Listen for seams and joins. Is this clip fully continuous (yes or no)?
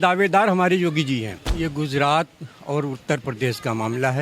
no